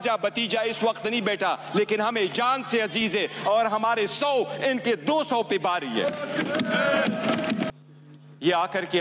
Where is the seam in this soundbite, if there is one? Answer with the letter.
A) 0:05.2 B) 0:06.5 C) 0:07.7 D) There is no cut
C